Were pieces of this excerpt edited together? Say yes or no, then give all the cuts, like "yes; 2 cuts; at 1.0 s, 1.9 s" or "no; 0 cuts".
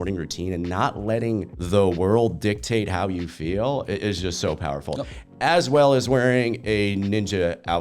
yes; 1 cut; at 1.5 s